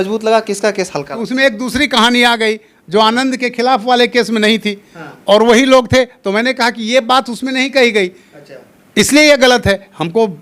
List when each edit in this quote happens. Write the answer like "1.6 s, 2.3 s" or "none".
1.1 s